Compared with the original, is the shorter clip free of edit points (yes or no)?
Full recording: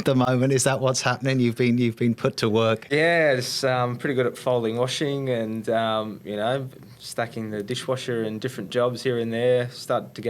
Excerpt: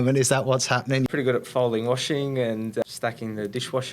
no